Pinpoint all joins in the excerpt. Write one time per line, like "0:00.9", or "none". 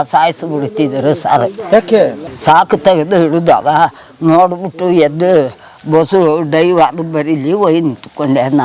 0:02.2